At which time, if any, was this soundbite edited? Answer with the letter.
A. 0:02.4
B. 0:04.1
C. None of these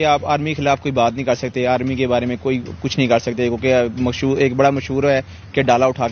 C